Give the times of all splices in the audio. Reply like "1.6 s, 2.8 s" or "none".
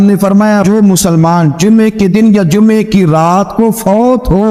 none

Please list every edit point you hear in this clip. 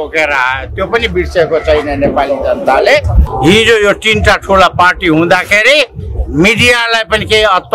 3.2 s

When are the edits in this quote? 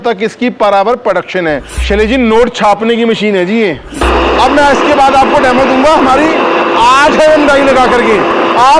1.8 s, 4.0 s

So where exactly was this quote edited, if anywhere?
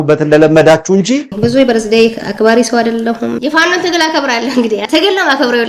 1.3 s, 2.2 s, 3.4 s, 4.8 s

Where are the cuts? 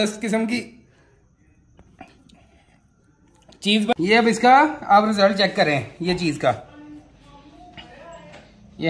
3.9 s

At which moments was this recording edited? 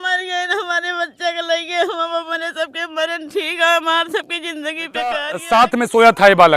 5.3 s

